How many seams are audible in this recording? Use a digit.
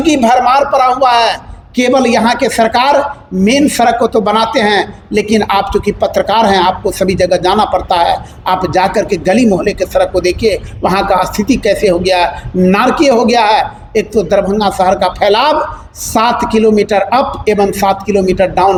0